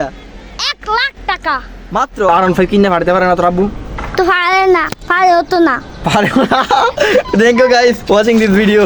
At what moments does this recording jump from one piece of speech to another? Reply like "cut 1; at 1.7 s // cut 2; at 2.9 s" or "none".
cut 1; at 2.3 s